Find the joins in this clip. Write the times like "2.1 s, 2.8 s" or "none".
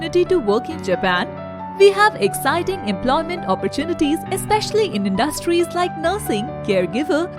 none